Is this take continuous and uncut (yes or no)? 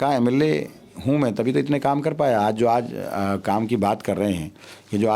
yes